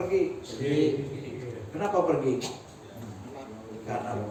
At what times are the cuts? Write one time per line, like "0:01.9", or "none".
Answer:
none

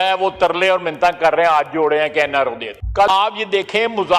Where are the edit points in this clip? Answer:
0:03.1

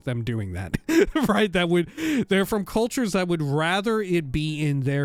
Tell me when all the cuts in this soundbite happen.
none

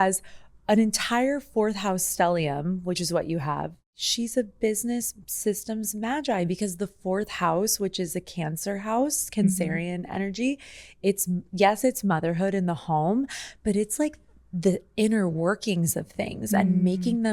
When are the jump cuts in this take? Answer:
0:03.8

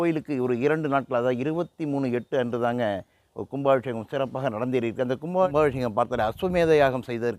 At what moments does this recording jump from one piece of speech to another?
0:05.5

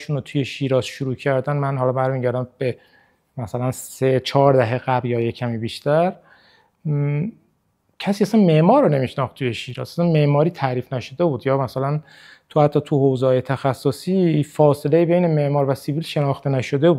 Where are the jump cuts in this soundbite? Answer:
none

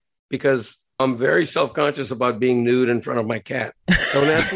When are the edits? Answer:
none

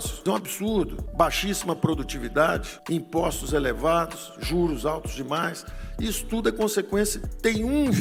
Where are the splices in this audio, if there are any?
none

